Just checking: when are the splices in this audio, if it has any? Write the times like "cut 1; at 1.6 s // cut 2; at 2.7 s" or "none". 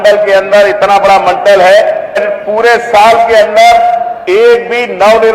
cut 1; at 2.2 s